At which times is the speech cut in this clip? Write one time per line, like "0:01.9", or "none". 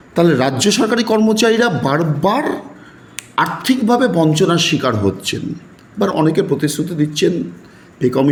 none